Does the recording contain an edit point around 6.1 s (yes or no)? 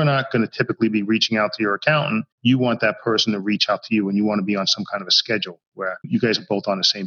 yes